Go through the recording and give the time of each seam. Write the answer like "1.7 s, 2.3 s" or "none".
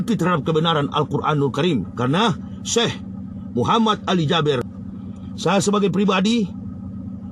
4.7 s